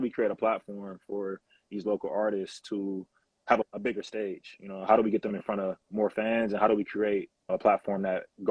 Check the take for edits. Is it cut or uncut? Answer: cut